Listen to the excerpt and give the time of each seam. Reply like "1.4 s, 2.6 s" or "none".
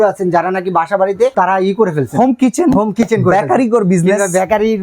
1.3 s